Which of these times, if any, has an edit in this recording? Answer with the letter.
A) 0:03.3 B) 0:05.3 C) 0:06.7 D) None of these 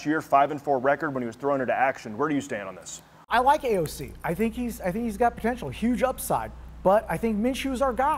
A